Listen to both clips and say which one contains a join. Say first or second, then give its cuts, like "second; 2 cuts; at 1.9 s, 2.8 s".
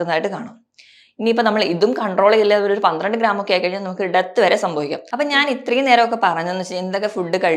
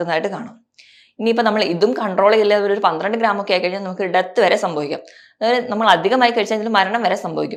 first; 1 cut; at 5.0 s